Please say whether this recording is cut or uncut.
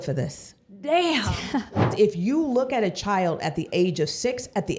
cut